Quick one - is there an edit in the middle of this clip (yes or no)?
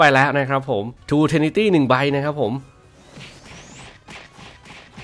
yes